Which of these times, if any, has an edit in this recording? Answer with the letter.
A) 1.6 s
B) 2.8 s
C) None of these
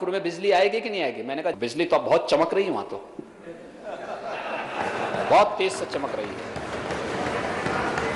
A